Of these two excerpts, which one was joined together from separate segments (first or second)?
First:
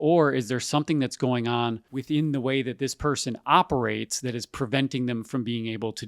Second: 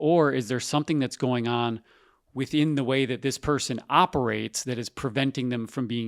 first